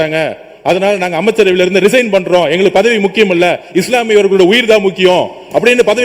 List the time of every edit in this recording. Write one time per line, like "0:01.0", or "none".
none